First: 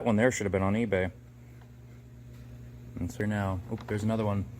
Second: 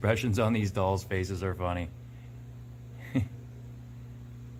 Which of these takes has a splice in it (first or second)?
first